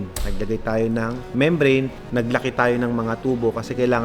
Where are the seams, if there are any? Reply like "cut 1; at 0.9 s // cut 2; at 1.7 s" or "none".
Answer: cut 1; at 1.2 s // cut 2; at 2.0 s